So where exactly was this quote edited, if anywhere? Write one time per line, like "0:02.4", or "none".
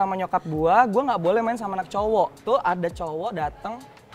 0:02.4